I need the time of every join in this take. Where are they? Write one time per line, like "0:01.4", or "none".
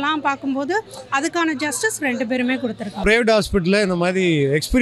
0:03.0